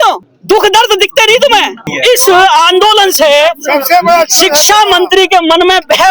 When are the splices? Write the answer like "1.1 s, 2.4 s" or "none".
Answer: 1.9 s